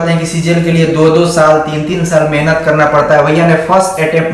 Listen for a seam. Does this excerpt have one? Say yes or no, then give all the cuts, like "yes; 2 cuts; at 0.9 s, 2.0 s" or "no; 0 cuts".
no; 0 cuts